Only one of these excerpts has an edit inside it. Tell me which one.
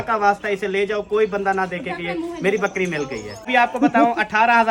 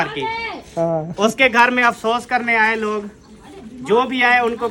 first; 1 cut; at 3.5 s

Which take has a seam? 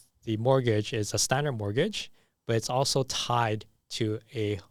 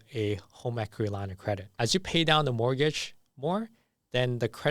second; 1 cut; at 1.7 s

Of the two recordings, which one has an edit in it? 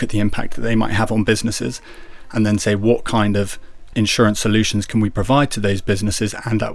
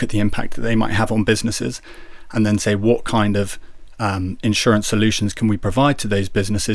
first; 1 cut; at 3.8 s

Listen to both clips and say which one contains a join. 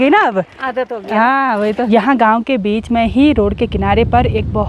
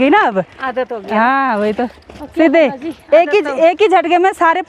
first; 1 cut; at 1.9 s

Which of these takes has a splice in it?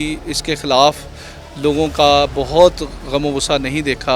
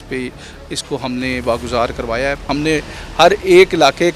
second; 1 cut; at 2.4 s

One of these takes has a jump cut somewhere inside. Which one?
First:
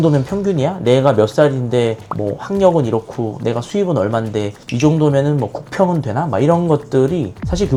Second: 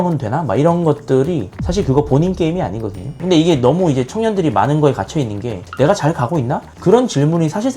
second; 1 cut; at 3.0 s

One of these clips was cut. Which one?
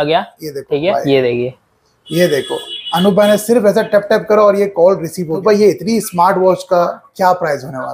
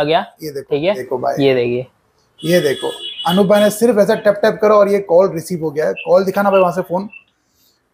first; 2 cuts; at 0.9 s, 5.4 s

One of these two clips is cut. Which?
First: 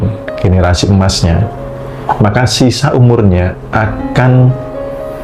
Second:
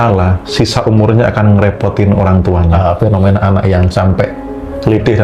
second; 1 cut; at 2.8 s

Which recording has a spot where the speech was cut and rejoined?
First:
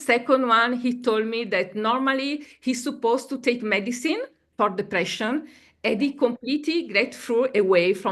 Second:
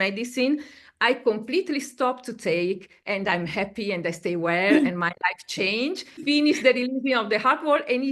second; 1 cut; at 6.2 s

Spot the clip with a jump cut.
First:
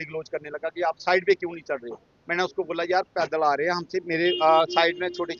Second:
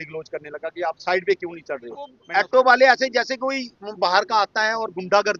second; 1 cut; at 2.2 s

